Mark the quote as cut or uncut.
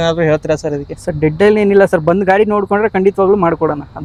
uncut